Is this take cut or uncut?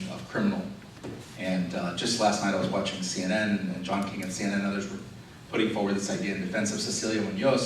cut